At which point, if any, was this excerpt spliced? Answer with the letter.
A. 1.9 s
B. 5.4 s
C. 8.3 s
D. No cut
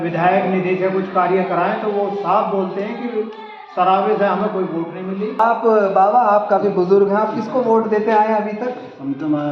B